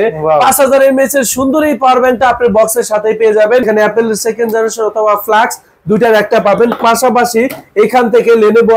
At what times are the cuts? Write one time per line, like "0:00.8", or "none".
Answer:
0:03.6

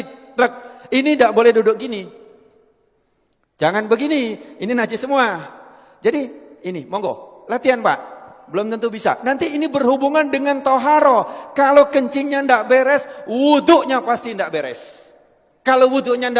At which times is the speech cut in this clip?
none

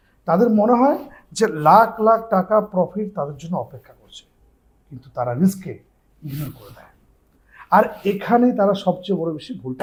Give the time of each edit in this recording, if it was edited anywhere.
none

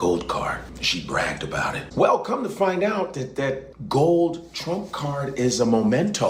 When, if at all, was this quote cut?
0:01.8

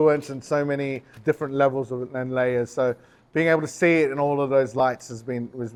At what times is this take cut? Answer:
none

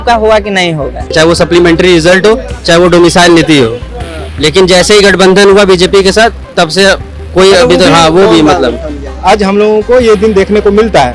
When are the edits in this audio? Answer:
0:01.1
0:09.0

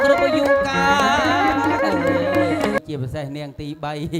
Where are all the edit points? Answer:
0:02.8

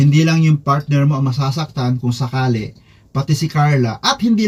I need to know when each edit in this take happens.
none

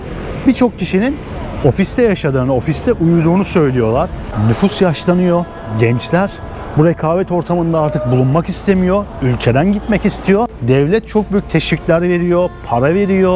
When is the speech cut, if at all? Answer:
0:04.2
0:10.6

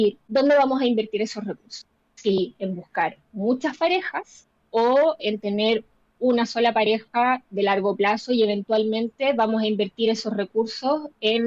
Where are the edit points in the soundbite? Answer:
none

